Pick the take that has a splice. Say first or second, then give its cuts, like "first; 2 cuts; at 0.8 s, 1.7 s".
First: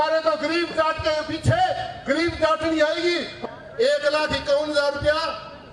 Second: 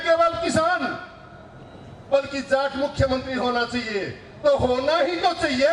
first; 1 cut; at 3.3 s